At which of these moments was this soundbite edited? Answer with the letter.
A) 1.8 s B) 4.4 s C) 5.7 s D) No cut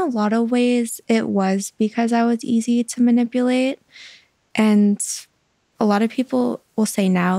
C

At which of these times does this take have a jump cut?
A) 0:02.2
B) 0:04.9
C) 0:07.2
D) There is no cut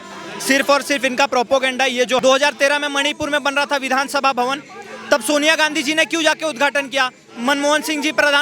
A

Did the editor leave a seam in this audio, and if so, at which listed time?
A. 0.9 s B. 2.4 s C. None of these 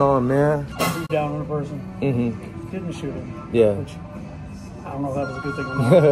A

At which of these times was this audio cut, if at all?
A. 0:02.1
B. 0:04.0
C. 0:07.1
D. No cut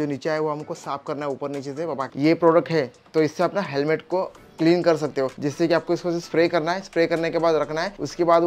A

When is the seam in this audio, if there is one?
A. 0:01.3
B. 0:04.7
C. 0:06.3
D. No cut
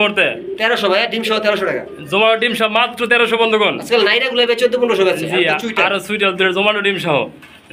D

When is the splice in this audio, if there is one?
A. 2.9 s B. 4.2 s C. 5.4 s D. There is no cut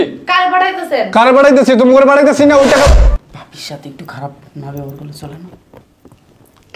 A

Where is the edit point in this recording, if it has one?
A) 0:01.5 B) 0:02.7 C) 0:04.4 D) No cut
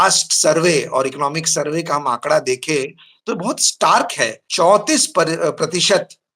C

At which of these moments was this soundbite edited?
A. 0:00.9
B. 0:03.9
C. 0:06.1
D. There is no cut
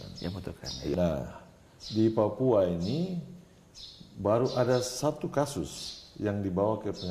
A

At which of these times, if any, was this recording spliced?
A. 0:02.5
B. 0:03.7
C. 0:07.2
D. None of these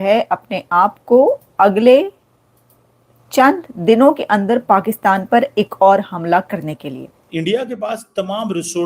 C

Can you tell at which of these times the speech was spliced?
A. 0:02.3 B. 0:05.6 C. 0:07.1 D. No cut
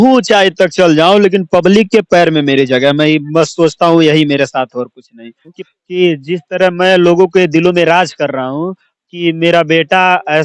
B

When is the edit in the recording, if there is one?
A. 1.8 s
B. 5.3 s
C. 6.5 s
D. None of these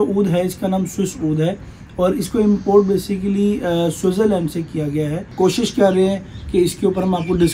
B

